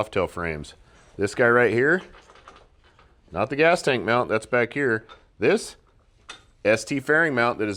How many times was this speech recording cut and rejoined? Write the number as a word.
zero